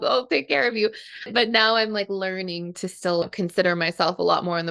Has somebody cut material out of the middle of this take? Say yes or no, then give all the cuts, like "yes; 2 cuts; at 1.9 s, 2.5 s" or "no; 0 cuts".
yes; 2 cuts; at 1.3 s, 3.2 s